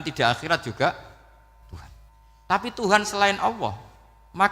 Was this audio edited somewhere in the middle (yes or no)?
yes